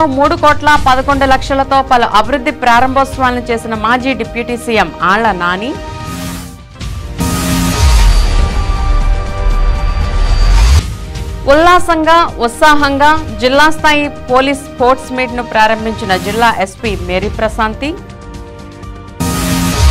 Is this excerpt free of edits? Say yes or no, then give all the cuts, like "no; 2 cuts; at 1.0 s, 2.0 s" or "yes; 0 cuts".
yes; 0 cuts